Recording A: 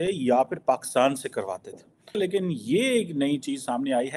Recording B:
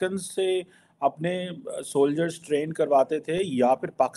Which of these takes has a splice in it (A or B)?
A